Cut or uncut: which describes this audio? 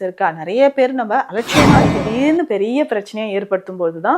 cut